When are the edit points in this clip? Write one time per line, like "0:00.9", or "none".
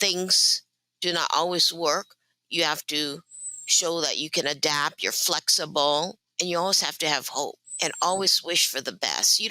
0:06.2
0:07.6